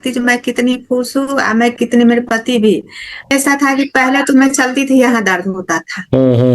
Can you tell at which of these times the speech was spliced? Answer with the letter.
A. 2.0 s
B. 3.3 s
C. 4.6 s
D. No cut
B